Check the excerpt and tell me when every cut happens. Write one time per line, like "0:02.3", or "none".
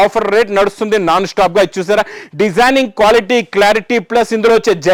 none